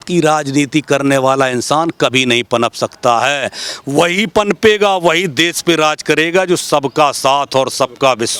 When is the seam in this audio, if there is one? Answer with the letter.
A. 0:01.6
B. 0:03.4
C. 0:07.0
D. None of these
D